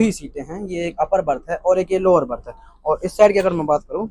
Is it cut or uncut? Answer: uncut